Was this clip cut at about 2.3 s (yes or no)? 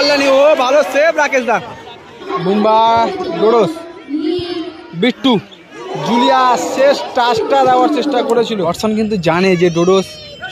yes